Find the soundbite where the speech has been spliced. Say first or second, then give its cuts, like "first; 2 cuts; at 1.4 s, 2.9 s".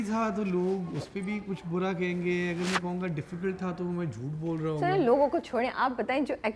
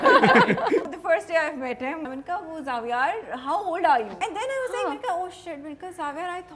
second; 3 cuts; at 0.9 s, 2.1 s, 4.3 s